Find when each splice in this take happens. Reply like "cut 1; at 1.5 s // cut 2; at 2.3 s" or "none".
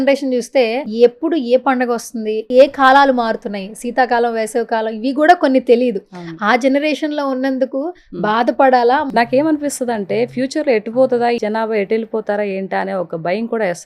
cut 1; at 0.8 s // cut 2; at 2.4 s // cut 3; at 9.1 s // cut 4; at 11.4 s